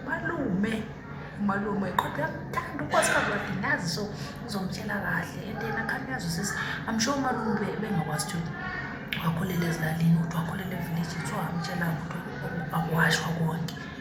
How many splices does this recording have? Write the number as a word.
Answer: zero